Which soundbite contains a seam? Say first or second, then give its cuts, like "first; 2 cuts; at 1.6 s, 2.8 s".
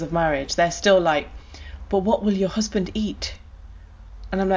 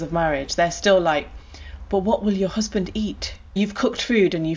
second; 1 cut; at 3.6 s